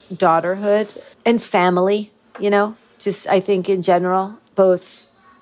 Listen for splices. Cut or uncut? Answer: cut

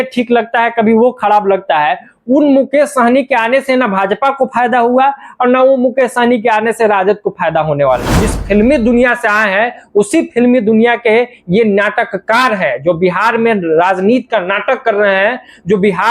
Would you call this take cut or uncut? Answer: cut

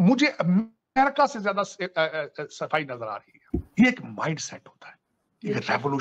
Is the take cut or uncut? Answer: cut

